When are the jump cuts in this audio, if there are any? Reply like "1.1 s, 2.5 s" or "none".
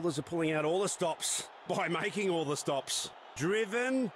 3.2 s